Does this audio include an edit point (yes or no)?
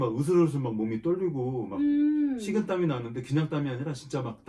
no